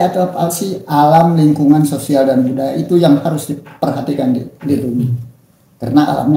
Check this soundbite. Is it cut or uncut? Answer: uncut